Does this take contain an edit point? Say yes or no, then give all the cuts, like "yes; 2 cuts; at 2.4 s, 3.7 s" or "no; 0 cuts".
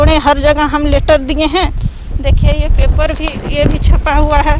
no; 0 cuts